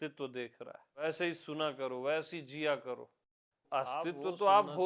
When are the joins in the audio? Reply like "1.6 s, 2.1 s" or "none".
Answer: 1.0 s, 3.6 s

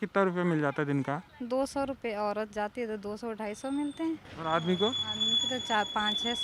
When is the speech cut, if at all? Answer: 1.3 s, 4.3 s

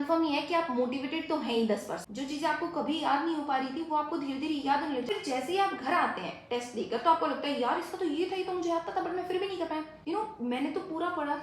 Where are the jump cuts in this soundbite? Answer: 2.0 s, 5.1 s, 9.9 s

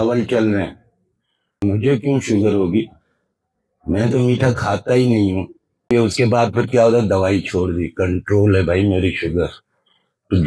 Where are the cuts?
1.6 s, 5.9 s

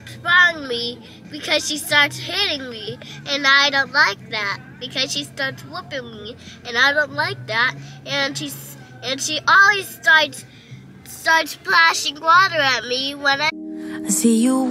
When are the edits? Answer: 13.5 s

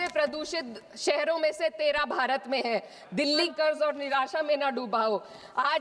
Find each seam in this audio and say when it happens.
3.5 s

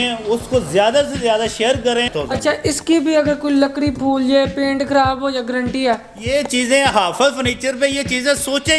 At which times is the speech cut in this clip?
2.1 s

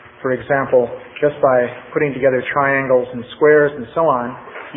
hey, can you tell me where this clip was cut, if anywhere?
2.7 s

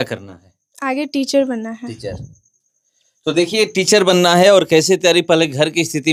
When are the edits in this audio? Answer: none

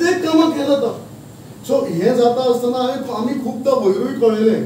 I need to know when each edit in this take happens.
none

